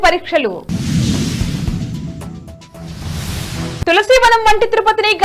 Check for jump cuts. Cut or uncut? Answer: uncut